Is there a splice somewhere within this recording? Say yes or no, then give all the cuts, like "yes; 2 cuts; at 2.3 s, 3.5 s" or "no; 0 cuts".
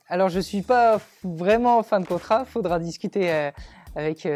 no; 0 cuts